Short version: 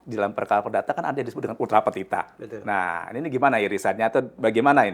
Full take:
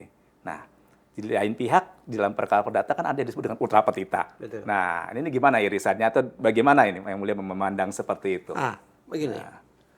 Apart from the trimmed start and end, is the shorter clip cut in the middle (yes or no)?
no